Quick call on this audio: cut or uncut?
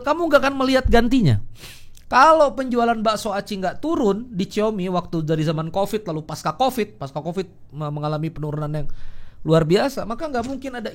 uncut